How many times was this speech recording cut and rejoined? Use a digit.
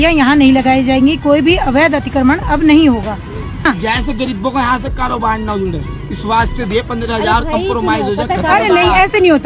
1